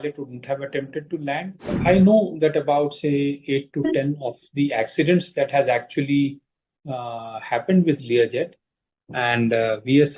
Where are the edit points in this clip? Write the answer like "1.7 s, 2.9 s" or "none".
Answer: 1.7 s